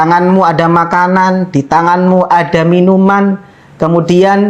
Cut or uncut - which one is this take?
uncut